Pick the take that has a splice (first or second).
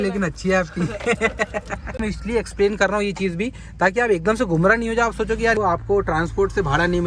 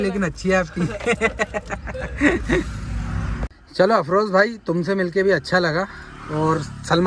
first